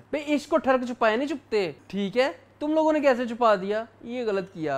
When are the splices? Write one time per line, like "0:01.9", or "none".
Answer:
0:01.8